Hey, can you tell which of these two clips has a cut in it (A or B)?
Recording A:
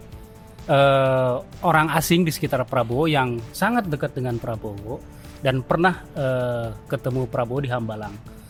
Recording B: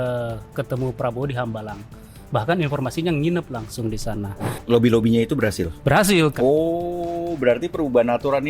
B